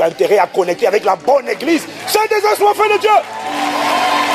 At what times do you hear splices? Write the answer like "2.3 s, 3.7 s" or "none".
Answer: none